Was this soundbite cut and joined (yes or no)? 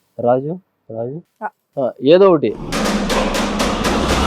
yes